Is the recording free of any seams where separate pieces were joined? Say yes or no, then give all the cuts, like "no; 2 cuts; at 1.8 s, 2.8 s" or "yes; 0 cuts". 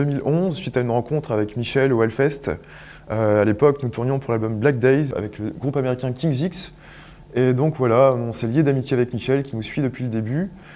no; 1 cut; at 5.3 s